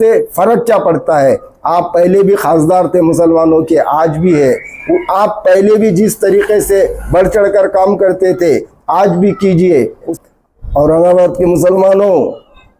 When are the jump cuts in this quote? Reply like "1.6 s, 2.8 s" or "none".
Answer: 10.1 s